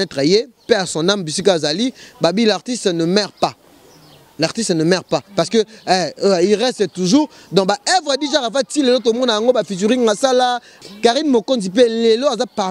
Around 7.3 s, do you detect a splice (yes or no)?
no